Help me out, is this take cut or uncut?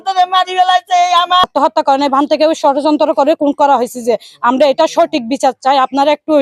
cut